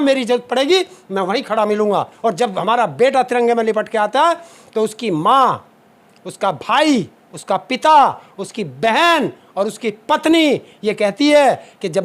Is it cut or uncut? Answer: cut